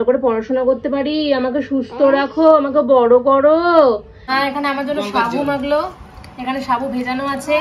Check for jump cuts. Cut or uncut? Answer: cut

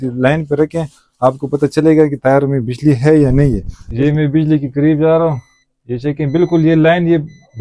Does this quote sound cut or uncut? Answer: cut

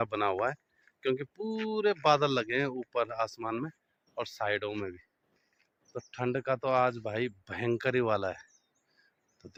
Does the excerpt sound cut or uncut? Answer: uncut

